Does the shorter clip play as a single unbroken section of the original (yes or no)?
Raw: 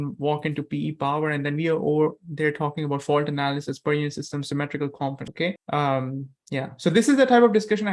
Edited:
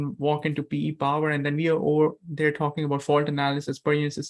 yes